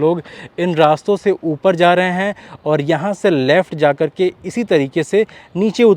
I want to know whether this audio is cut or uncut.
uncut